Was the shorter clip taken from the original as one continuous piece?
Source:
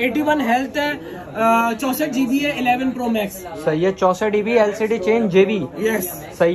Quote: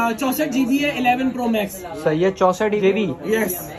no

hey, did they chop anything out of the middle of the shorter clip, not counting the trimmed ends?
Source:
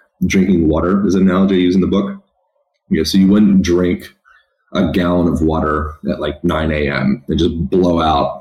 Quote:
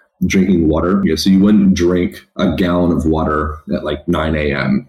yes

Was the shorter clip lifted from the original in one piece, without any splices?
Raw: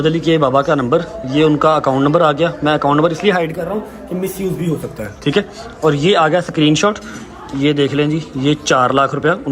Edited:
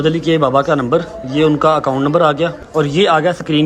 no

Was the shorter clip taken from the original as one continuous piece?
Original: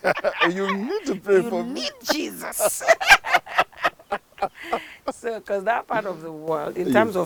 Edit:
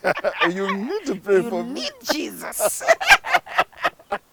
yes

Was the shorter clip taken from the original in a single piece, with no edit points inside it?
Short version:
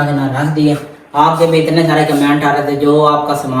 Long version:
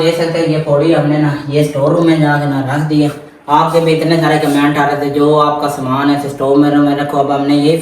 yes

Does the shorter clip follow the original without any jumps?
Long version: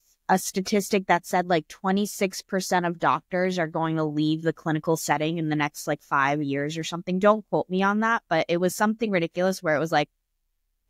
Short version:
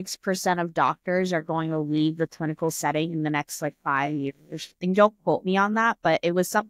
yes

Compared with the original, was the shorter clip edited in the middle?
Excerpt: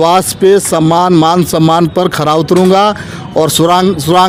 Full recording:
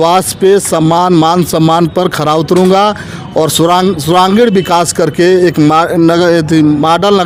no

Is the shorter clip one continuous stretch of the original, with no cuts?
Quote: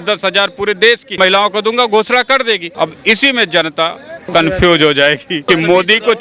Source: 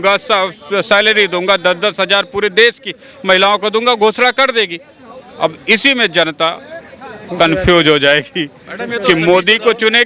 no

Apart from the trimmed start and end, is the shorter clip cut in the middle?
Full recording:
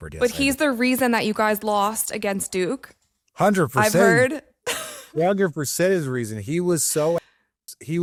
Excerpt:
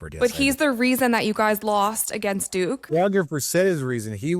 yes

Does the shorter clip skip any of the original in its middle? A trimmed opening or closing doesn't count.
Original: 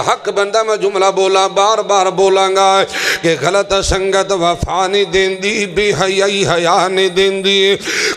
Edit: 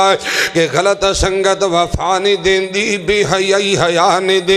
no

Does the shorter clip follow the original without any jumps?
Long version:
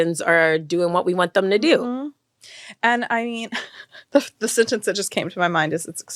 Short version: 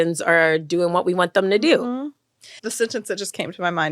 no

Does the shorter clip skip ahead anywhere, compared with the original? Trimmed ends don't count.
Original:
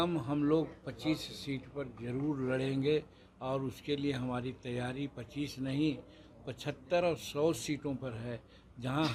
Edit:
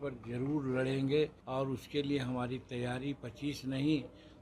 yes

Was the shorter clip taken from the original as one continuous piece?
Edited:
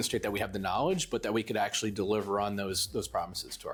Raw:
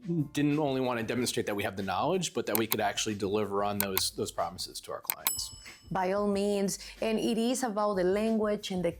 yes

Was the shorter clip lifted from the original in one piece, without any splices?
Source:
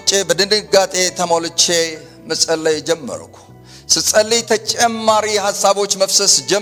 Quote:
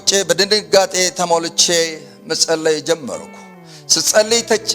yes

